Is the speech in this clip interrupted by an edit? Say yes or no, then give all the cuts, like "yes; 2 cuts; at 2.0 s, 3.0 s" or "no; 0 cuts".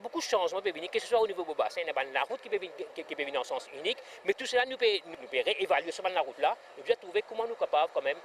no; 0 cuts